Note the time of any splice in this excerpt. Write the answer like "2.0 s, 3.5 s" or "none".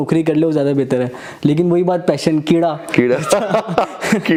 none